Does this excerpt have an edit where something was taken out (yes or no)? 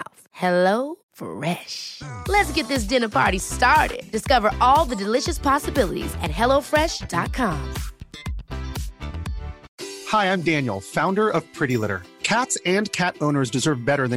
yes